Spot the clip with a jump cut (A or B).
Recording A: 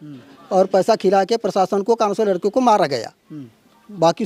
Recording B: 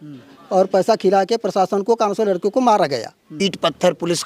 B